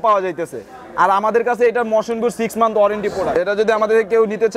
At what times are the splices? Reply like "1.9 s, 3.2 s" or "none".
3.4 s